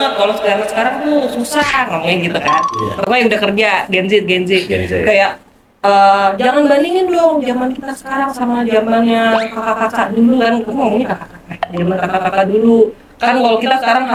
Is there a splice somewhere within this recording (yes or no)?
no